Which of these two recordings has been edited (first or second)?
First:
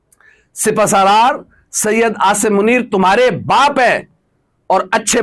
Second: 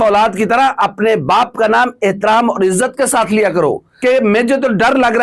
second